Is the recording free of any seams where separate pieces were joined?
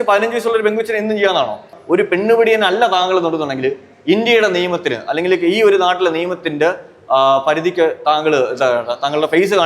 no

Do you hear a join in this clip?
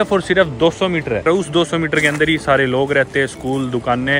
yes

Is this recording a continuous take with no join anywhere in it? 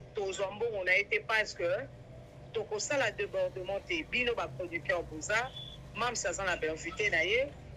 yes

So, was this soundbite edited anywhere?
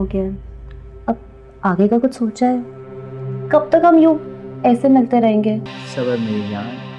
yes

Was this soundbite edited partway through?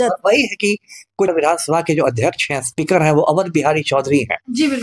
yes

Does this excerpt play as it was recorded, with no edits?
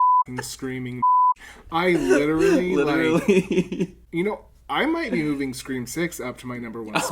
no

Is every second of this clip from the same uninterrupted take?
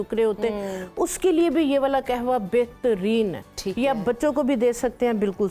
yes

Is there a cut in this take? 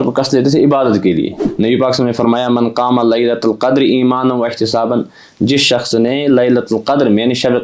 yes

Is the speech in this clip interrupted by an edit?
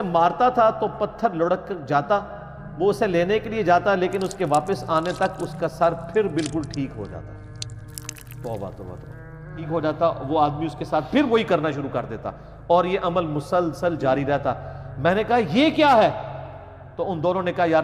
yes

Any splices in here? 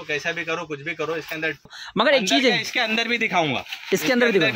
yes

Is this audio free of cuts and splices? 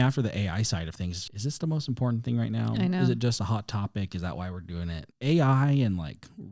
no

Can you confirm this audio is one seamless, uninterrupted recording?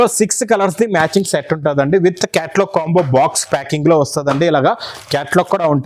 yes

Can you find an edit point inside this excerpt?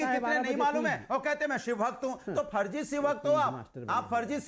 no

